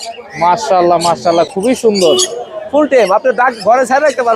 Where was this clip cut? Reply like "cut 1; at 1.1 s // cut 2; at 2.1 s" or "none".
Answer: none